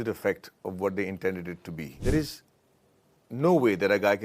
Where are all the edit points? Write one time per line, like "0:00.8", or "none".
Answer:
0:01.9